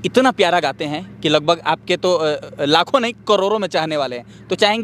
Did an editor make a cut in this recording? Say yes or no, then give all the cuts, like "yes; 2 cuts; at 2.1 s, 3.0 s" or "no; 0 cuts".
no; 0 cuts